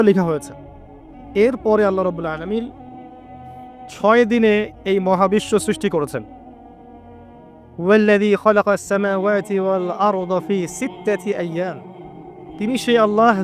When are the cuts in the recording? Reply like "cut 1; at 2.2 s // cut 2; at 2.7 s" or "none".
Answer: none